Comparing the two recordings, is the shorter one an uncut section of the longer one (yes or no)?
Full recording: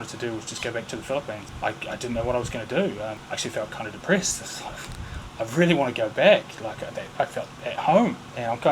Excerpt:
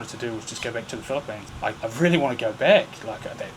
no